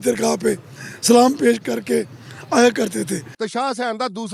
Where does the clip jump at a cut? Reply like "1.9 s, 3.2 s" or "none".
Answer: 3.3 s